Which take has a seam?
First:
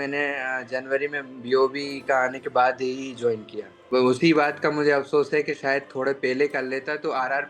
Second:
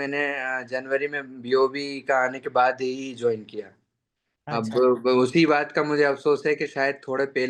first; 1 cut; at 3.9 s

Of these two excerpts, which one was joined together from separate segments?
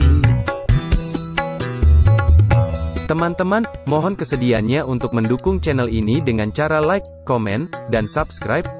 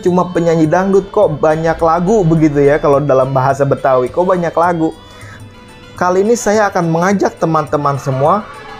second; 1 cut; at 5.4 s

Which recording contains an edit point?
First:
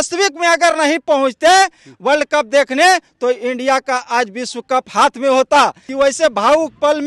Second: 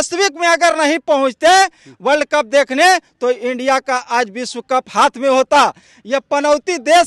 first; 1 cut; at 5.8 s

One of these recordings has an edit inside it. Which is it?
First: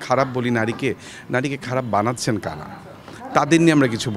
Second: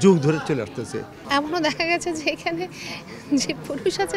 second; 1 cut; at 1.1 s

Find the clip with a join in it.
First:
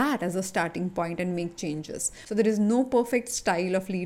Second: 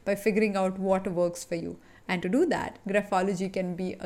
first; 1 cut; at 2.1 s

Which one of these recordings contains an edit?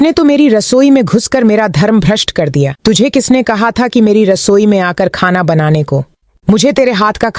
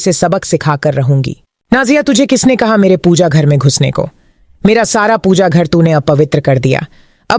first; 1 cut; at 6.2 s

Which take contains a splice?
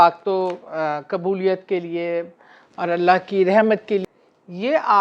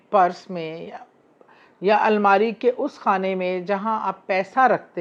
first; 1 cut; at 4.1 s

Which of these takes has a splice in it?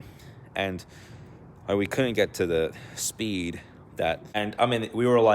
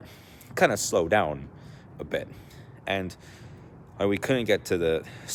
first; 1 cut; at 4.4 s

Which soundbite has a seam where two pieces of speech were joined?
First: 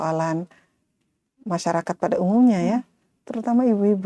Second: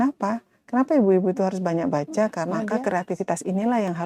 second; 1 cut; at 2.6 s

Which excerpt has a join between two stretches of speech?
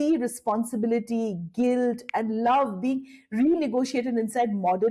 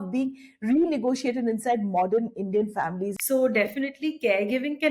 second; 1 cut; at 3.1 s

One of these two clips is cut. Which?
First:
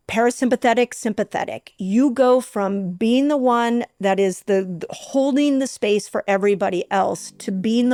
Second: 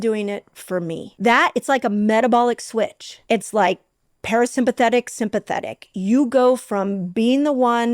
second; 2 cuts; at 1.0 s, 3.1 s

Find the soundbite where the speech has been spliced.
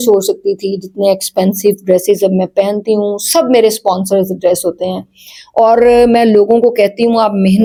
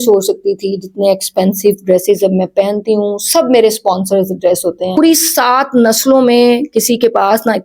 second; 1 cut; at 5.0 s

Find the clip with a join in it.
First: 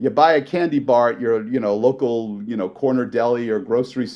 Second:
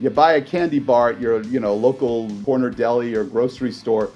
second; 1 cut; at 2.4 s

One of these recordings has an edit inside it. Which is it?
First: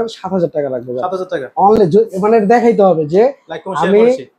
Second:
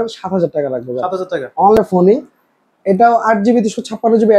second; 1 cut; at 1.7 s

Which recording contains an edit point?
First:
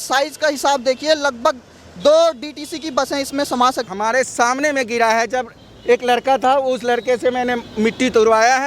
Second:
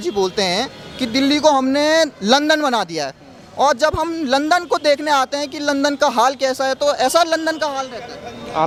first; 1 cut; at 3.9 s

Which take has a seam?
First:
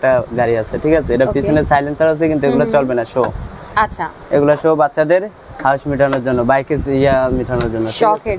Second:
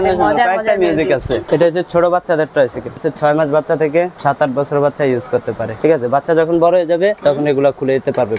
second; 5 cuts; at 1.4 s, 3.0 s, 4.1 s, 5.7 s, 7.2 s

